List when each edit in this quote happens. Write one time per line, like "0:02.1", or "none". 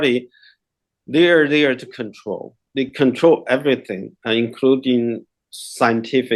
none